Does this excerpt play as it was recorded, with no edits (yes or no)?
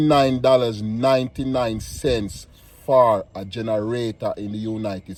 yes